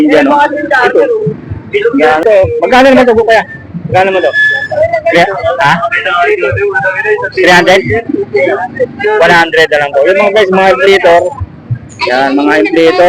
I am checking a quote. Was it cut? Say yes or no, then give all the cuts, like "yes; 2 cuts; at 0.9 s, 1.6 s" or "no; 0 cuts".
yes; 1 cut; at 2.2 s